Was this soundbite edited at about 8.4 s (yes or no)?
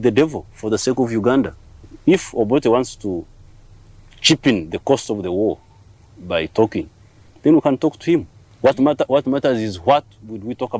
yes